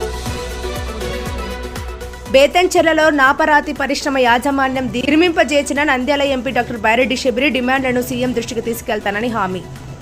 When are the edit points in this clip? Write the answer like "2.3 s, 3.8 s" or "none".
2.2 s